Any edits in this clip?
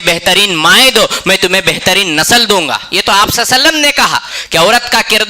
no; 0 cuts

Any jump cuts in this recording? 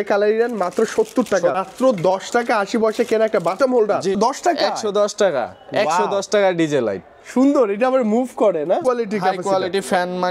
yes; 3 cuts; at 1.6 s, 4.2 s, 8.8 s

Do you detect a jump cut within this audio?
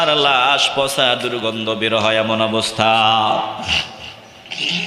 no; 0 cuts

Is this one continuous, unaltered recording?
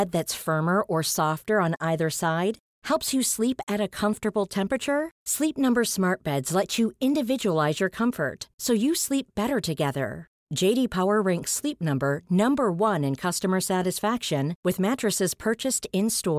yes; 0 cuts

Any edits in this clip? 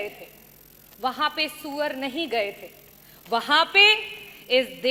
no; 0 cuts

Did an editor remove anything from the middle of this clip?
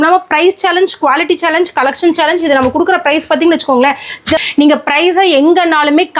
yes; 1 cut; at 4.4 s

